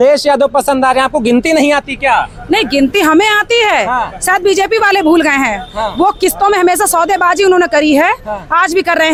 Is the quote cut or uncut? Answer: uncut